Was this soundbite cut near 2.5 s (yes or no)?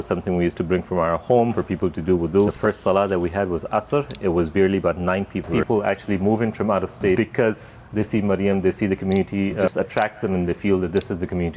yes